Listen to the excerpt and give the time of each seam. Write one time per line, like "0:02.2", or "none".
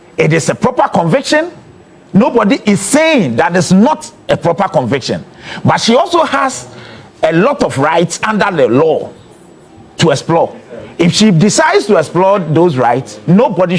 none